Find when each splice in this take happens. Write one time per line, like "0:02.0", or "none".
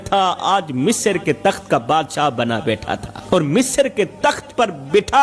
0:03.1